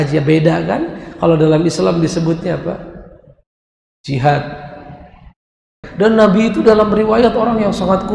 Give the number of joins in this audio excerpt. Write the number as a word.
one